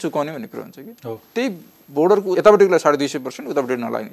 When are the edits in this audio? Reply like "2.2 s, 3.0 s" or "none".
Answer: 2.3 s